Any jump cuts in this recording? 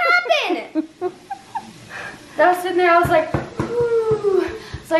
no; 0 cuts

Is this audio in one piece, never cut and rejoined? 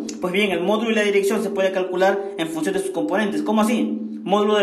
no; 1 cut; at 2.9 s

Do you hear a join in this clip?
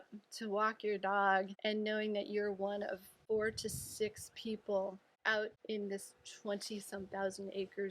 yes; 3 cuts; at 1.5 s, 3.1 s, 5.5 s

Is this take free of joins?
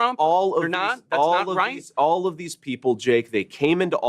yes; 0 cuts

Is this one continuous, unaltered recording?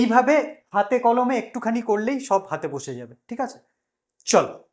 yes; 0 cuts

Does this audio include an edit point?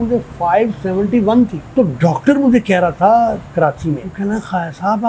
yes; 2 cuts; at 1.6 s, 4.1 s

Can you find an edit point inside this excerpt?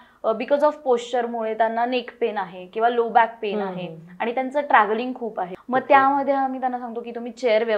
yes; 1 cut; at 5.5 s

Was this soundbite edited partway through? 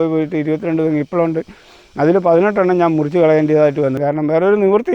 yes; 1 cut; at 4.0 s

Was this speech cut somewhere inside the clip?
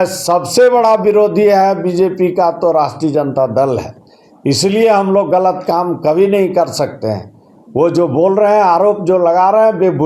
no; 0 cuts

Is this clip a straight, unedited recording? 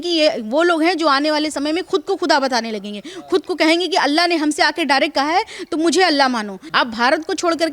no; 1 cut; at 6.6 s

